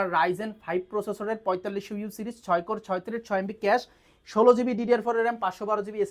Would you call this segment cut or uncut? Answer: uncut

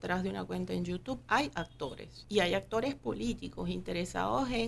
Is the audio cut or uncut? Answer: cut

